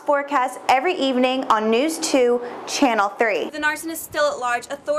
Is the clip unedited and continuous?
no; 1 cut; at 3.5 s

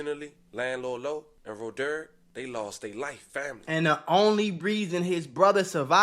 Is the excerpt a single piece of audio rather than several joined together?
no; 1 cut; at 3.2 s

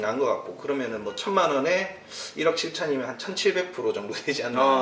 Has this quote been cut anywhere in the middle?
no; 0 cuts

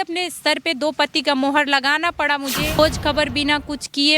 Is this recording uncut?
no; 1 cut; at 2.8 s

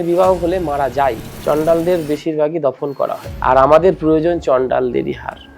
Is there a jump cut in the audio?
yes; 2 cuts; at 1.3 s, 3.3 s

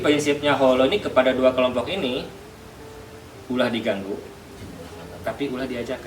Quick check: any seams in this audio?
no; 0 cuts

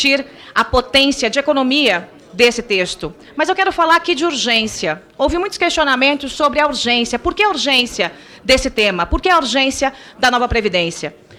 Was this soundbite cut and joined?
no; 0 cuts

